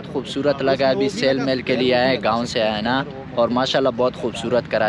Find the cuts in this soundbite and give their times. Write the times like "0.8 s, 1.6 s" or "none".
none